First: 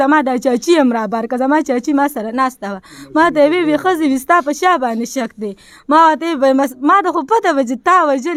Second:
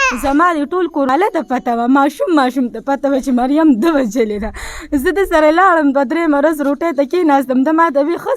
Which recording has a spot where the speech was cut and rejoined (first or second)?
second